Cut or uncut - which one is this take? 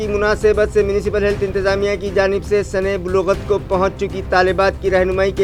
uncut